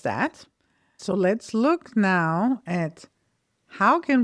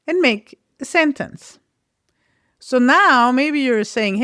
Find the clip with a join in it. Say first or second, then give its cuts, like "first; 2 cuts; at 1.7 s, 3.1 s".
first; 1 cut; at 1.0 s